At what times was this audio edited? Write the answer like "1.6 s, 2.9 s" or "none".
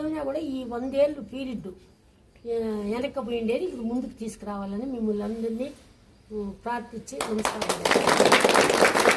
none

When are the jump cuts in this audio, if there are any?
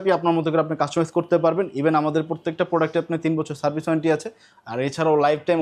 none

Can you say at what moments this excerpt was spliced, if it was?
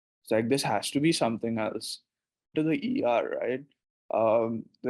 2.5 s

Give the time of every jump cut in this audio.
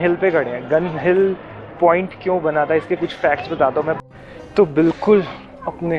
4.0 s

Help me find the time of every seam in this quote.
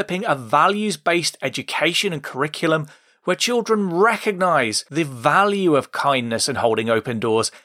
4.8 s

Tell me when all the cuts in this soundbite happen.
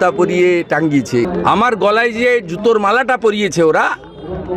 1.3 s

